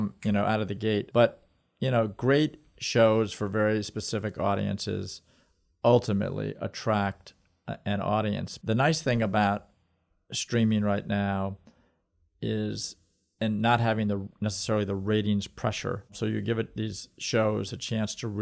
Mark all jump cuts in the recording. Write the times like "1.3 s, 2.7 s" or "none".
1.1 s, 8.5 s, 16.2 s